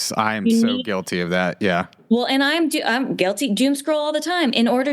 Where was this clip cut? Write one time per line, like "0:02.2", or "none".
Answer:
0:01.9